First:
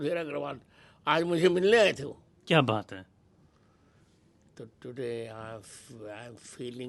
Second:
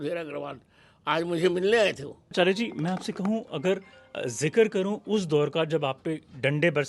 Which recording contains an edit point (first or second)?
second